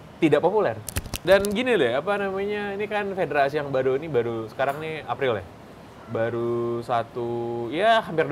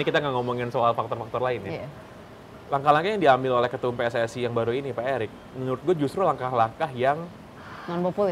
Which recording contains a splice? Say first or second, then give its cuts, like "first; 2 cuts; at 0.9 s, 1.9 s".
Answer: first; 1 cut; at 1.2 s